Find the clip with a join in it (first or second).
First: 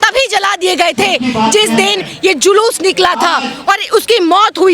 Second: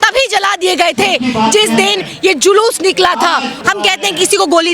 second